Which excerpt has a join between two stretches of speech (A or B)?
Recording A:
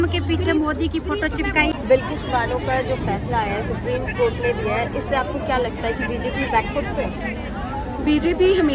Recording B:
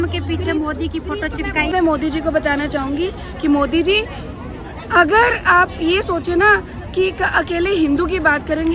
B